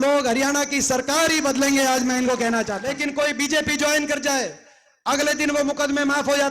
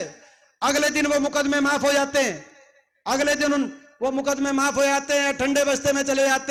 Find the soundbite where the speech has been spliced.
first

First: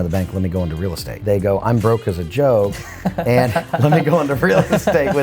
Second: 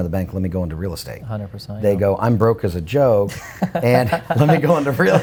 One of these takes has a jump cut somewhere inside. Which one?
first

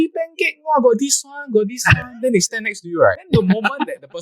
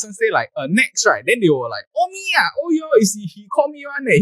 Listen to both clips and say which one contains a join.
first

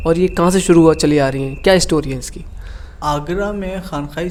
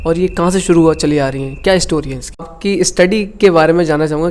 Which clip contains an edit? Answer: second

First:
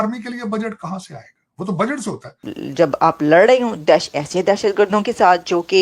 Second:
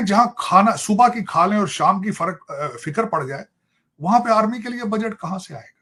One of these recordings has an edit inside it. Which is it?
first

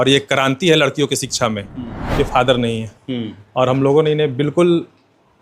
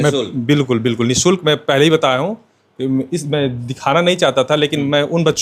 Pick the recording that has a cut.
first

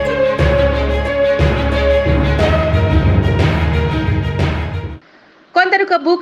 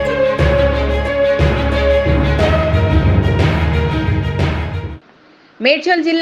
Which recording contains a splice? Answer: first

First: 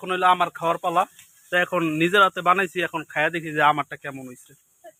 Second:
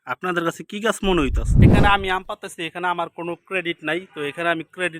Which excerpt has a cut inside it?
second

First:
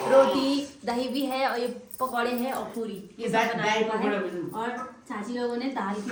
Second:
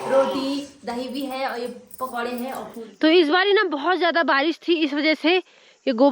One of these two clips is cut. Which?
second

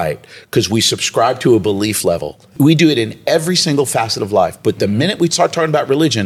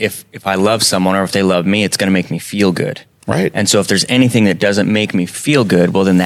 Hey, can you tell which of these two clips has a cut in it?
first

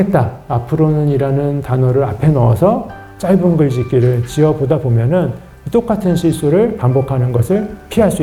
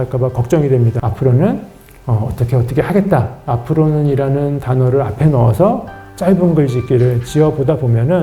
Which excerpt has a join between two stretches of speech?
second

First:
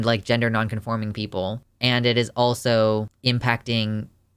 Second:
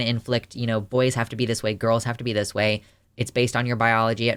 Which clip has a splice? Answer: first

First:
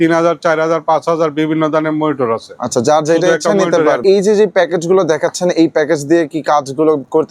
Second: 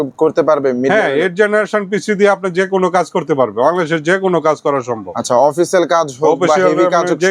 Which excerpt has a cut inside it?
first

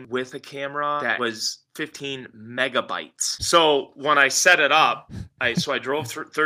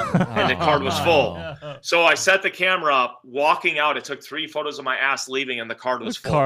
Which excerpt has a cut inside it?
first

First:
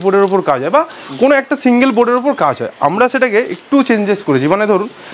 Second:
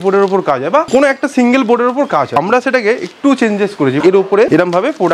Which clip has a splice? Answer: second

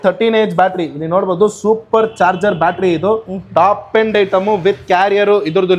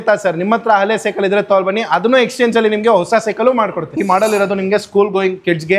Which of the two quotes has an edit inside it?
second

